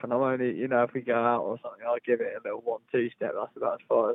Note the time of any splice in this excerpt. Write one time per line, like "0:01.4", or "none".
none